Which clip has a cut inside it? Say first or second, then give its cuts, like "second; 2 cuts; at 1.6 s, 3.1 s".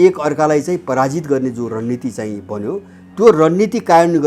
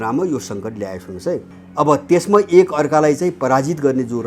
second; 1 cut; at 1.6 s